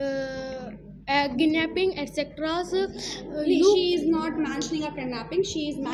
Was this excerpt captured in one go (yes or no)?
yes